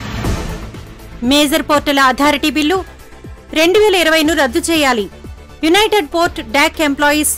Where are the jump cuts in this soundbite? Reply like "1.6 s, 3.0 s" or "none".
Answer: 1.0 s